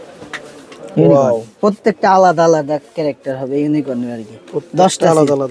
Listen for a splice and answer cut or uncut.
uncut